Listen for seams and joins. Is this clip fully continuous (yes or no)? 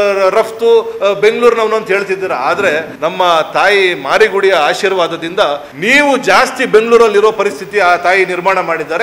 no